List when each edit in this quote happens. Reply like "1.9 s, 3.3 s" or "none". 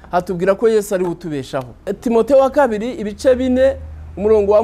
1.9 s